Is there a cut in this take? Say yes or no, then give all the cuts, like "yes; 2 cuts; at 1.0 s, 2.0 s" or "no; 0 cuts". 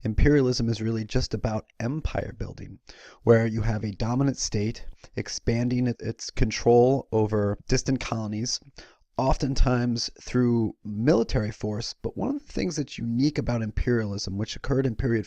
yes; 1 cut; at 4.4 s